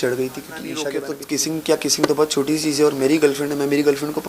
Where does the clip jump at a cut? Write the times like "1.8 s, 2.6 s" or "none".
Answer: 1.0 s